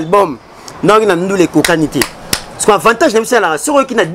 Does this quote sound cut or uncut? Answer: uncut